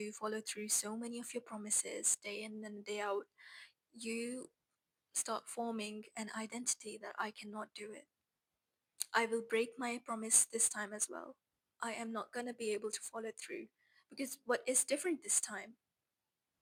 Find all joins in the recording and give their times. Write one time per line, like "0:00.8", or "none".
none